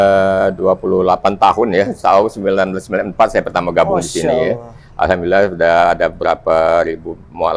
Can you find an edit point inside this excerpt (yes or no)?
no